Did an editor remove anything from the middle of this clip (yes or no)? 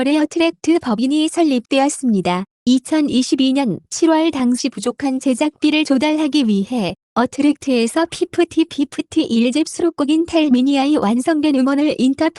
no